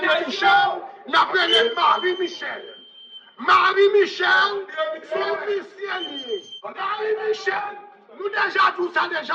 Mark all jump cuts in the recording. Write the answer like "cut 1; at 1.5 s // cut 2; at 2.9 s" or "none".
cut 1; at 6.6 s